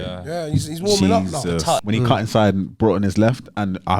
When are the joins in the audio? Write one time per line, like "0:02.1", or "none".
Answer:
0:01.8